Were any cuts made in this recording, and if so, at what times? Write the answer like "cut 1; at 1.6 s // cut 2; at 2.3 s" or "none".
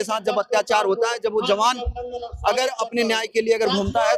none